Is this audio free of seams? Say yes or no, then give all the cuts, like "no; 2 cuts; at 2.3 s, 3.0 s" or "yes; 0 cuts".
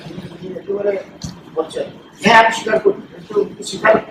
yes; 0 cuts